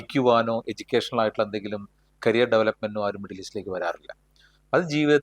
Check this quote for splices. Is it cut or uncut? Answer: uncut